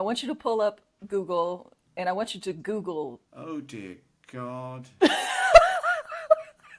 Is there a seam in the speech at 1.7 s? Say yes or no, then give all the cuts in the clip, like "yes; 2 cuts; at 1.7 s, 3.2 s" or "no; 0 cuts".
no; 1 cut; at 3.2 s